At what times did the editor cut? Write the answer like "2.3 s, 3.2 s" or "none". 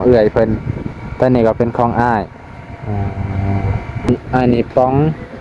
4.1 s